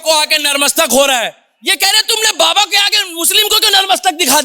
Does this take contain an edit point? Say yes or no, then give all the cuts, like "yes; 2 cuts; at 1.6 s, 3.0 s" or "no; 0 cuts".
no; 0 cuts